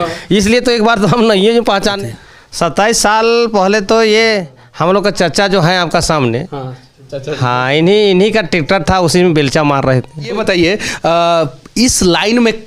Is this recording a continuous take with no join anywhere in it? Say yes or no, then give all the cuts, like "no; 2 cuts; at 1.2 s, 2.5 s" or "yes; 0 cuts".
no; 2 cuts; at 2.0 s, 10.4 s